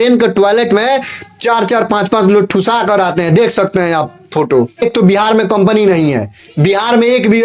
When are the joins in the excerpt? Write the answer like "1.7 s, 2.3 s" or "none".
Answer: 4.9 s